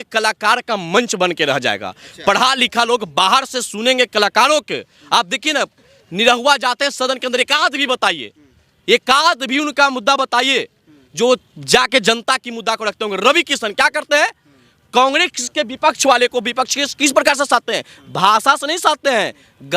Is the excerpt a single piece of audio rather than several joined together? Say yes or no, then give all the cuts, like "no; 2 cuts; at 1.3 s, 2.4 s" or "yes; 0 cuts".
yes; 0 cuts